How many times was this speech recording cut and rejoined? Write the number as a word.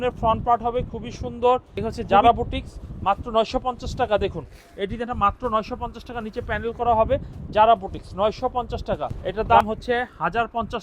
two